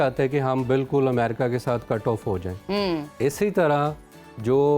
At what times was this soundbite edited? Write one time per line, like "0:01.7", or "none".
none